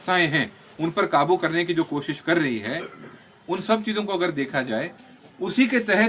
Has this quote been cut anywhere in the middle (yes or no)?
no